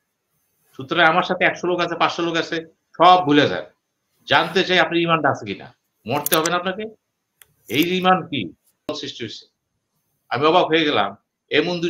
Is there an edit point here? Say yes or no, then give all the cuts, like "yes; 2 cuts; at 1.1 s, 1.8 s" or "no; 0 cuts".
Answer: yes; 1 cut; at 8.9 s